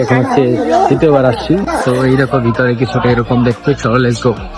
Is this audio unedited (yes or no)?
yes